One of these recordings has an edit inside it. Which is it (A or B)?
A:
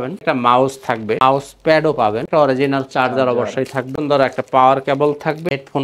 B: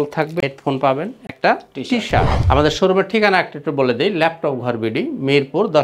B